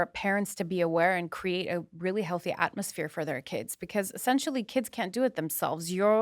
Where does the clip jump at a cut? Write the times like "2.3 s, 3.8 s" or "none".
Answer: none